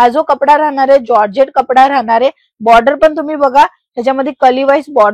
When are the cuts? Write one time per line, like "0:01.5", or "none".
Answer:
none